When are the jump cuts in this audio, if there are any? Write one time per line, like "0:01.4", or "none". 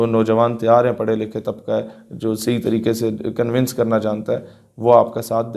none